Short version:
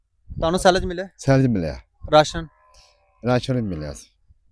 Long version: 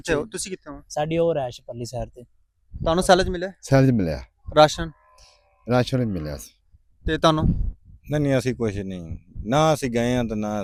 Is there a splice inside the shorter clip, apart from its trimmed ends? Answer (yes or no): no